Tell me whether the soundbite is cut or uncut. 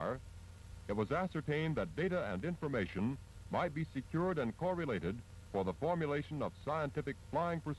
uncut